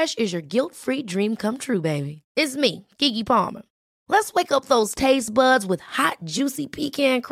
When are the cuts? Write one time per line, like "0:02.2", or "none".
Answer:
none